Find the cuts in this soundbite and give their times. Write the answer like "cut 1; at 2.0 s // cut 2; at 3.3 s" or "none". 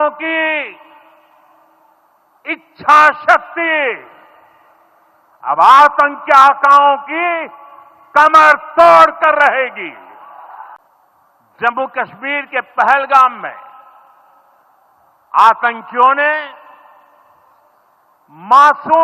cut 1; at 10.8 s